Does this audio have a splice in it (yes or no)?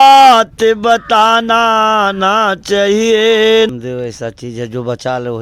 yes